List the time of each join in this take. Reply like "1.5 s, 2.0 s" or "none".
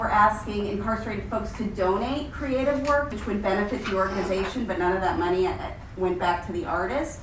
3.1 s